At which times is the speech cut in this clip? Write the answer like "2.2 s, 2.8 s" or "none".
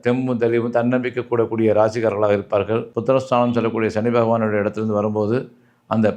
2.9 s